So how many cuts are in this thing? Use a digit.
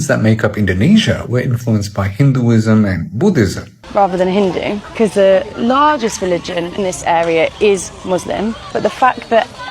1